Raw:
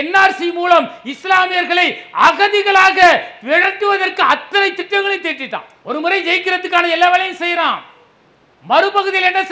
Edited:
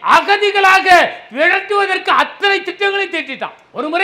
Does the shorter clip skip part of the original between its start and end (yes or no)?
no